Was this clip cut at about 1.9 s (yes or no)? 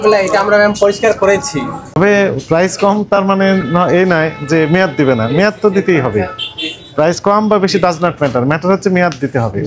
yes